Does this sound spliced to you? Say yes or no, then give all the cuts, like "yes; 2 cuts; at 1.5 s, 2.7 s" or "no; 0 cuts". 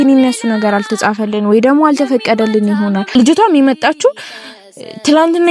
yes; 1 cut; at 3.1 s